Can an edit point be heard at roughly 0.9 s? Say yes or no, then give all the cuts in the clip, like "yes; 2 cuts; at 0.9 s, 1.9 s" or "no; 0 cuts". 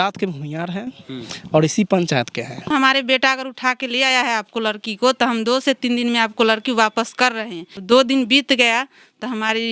no; 2 cuts; at 2.7 s, 7.7 s